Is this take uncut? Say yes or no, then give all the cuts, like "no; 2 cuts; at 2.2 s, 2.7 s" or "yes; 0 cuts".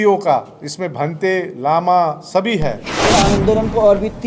no; 1 cut; at 2.9 s